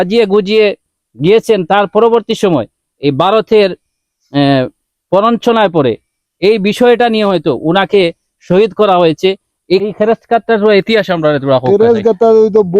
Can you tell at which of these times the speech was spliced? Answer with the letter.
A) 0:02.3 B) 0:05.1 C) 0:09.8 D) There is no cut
C